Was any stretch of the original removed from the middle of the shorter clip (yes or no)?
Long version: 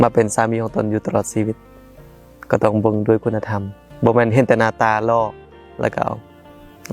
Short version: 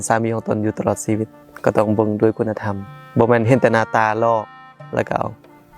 yes